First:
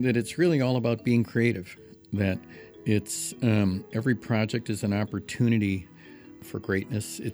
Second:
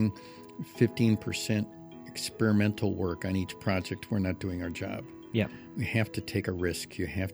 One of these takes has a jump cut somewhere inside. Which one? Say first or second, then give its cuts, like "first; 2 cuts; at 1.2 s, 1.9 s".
first; 1 cut; at 6.4 s